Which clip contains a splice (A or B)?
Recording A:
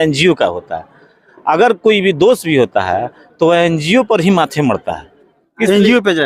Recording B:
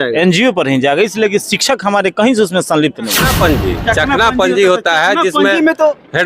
B